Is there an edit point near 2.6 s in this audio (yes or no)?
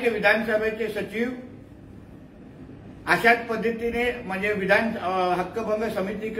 no